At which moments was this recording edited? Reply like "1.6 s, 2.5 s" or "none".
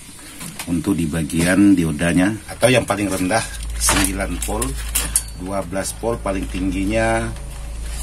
2.5 s